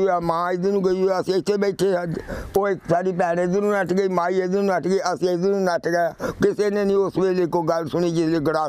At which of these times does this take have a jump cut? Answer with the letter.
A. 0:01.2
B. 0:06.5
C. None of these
C